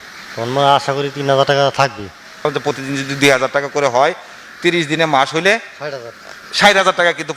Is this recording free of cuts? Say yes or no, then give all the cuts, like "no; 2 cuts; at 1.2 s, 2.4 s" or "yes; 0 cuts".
no; 1 cut; at 2.5 s